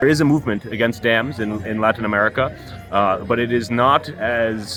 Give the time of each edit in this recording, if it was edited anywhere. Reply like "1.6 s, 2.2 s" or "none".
none